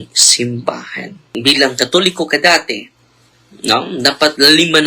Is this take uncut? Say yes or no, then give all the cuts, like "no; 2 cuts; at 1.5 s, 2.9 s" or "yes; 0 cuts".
no; 1 cut; at 1.2 s